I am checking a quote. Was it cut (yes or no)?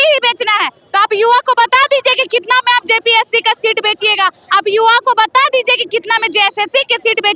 no